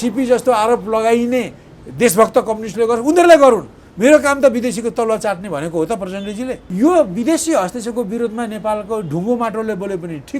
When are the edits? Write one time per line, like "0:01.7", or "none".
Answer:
0:06.6